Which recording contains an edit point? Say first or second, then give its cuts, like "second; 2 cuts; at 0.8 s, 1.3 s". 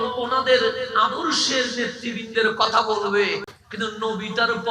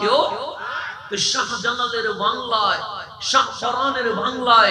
first; 1 cut; at 3.6 s